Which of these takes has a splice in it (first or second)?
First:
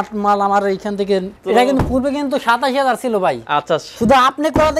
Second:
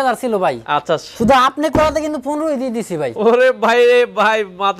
first